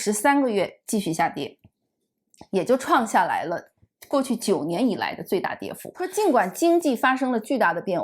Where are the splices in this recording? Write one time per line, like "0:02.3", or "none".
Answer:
0:06.0